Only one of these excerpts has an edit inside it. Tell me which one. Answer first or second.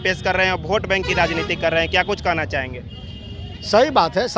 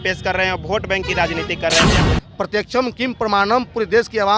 second